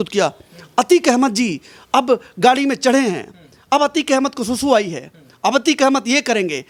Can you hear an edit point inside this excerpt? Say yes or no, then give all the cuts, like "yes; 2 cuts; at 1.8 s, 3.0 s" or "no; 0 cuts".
no; 0 cuts